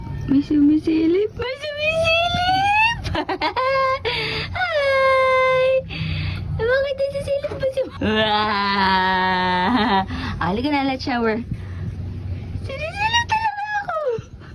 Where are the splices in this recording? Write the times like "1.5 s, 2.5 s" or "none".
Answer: none